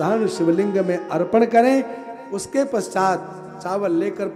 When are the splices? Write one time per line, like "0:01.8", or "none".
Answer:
none